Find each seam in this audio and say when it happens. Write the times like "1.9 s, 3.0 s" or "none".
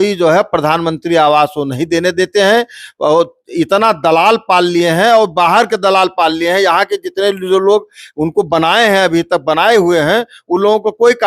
none

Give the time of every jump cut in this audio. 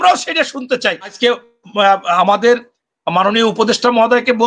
1.1 s

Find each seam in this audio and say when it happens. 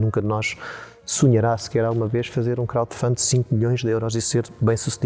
none

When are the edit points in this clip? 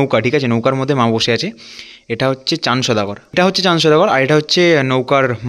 3.2 s

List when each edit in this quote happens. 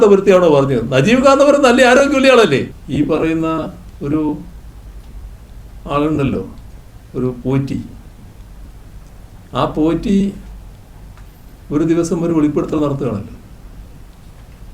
2.8 s

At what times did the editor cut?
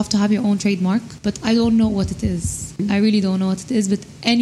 2.8 s

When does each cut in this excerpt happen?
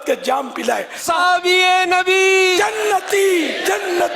1.0 s

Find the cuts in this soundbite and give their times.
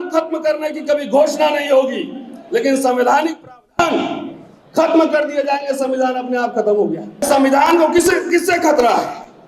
7.2 s

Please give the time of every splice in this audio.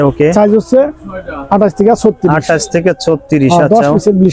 none

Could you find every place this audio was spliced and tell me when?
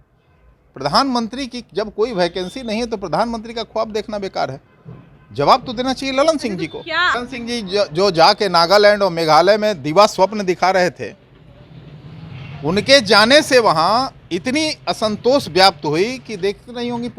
7.1 s

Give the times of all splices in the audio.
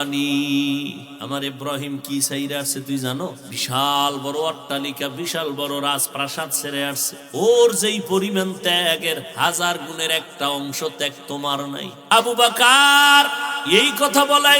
1.1 s, 3.5 s, 7.1 s, 11.9 s, 13.5 s

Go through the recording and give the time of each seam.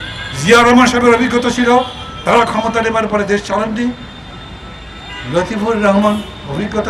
none

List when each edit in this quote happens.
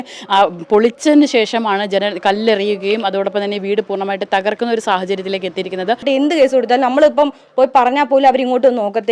6.0 s

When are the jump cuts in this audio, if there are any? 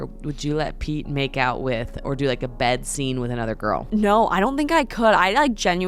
3.8 s

